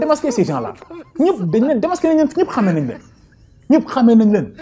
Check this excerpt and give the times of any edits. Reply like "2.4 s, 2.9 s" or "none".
none

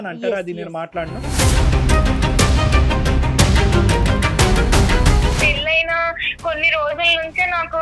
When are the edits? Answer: 5.4 s

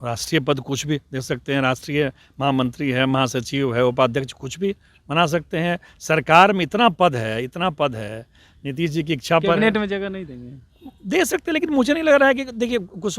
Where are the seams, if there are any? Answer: none

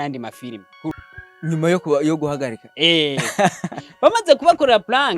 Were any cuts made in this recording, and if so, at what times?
0.9 s

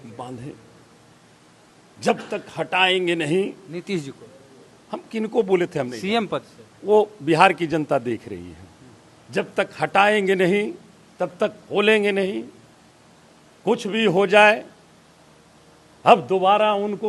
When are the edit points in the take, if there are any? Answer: none

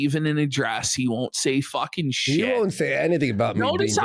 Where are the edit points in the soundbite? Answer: none

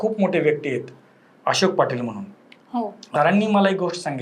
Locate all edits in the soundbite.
3.0 s

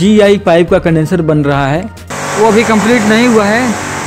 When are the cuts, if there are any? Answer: 2.0 s

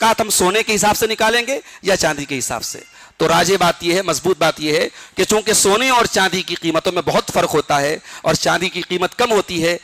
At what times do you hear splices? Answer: none

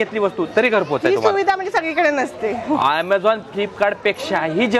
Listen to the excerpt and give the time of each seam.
none

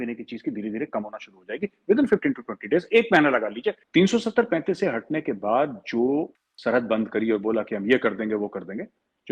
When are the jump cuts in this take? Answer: 3.8 s, 6.4 s

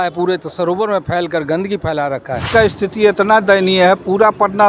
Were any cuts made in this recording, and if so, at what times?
2.5 s

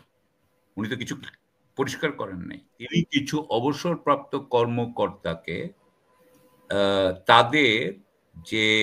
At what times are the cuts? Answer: 2.8 s

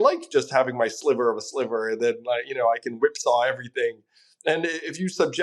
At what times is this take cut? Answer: none

